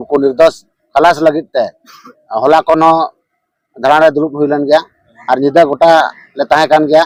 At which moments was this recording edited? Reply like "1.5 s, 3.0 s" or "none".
none